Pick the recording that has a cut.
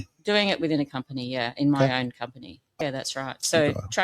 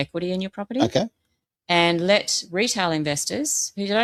first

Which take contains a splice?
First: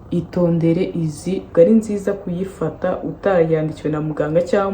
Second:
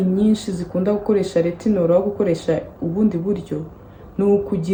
first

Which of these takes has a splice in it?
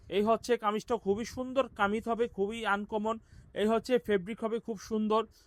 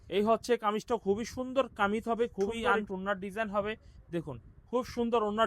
second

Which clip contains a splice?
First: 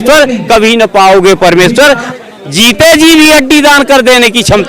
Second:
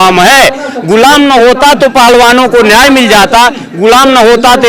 first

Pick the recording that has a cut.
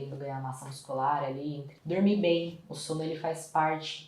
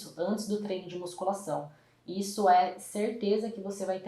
first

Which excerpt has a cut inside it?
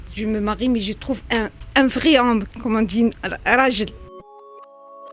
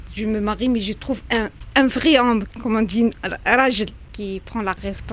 first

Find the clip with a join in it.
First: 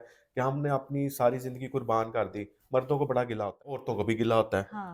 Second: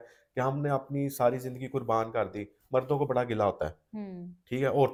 first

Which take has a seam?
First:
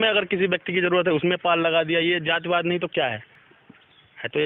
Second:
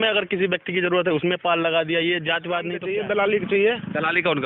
second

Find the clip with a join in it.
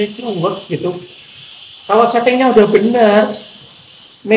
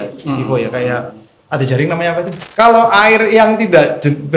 second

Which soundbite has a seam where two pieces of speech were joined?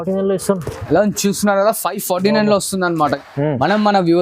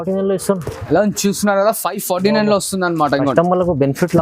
first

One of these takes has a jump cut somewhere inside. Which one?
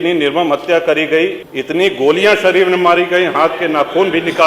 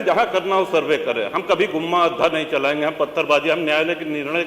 first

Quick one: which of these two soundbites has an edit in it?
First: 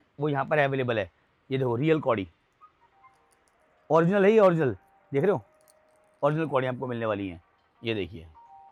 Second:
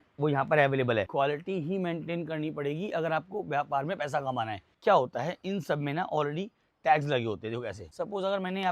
second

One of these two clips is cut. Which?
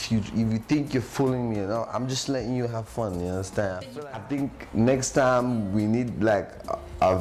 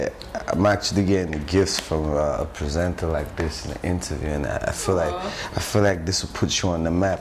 first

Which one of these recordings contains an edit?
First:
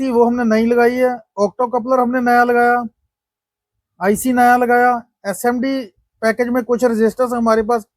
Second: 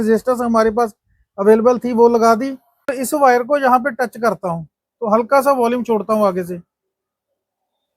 second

